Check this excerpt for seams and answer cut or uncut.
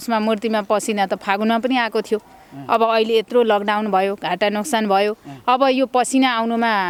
uncut